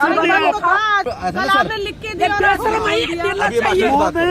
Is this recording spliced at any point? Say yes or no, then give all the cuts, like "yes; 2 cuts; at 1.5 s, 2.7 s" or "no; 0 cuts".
yes; 1 cut; at 1.1 s